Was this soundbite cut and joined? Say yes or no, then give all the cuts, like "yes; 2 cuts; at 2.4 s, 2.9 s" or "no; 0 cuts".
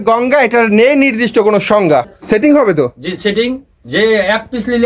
yes; 1 cut; at 2.1 s